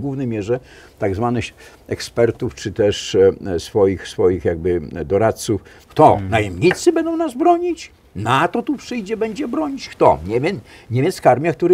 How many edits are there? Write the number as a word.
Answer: one